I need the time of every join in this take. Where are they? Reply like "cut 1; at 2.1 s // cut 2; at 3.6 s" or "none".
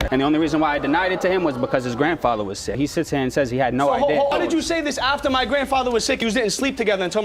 none